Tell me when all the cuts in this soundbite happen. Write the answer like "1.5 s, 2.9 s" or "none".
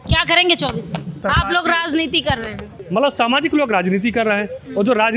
1.2 s, 2.7 s